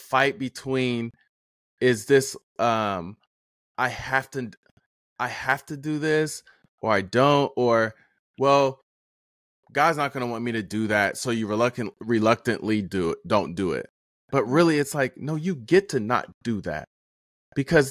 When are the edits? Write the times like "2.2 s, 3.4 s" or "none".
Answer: none